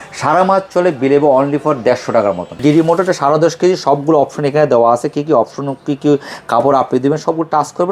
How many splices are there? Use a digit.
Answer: 1